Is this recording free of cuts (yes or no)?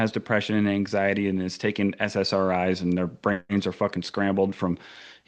yes